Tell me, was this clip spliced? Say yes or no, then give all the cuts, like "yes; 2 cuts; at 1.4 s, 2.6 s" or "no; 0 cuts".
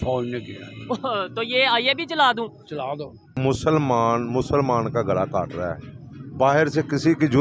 yes; 1 cut; at 3.4 s